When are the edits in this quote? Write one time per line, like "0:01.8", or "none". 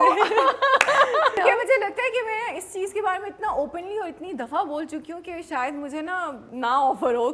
0:01.4
0:06.4